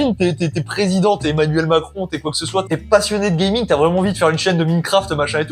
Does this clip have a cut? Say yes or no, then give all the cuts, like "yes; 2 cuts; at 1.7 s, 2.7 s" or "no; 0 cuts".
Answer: yes; 1 cut; at 2.7 s